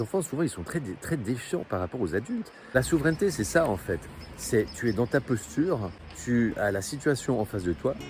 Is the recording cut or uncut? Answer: cut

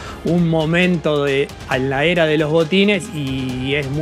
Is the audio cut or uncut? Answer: cut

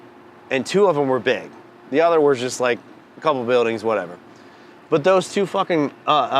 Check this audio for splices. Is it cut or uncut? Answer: uncut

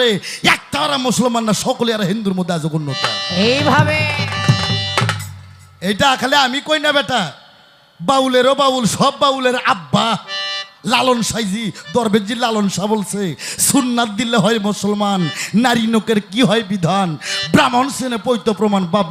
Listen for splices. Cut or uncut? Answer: uncut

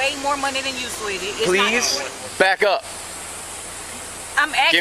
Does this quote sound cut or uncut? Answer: cut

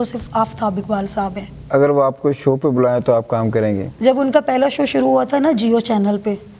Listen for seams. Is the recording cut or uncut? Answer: cut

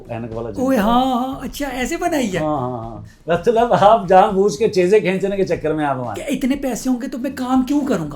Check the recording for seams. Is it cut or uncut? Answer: cut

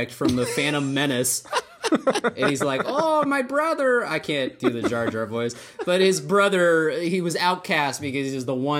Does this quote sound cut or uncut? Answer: cut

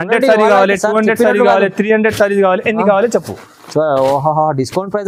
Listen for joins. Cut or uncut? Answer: uncut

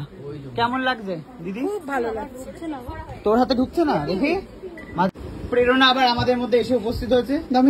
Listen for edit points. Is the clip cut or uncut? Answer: cut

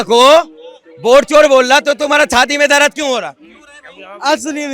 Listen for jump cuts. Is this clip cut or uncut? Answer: uncut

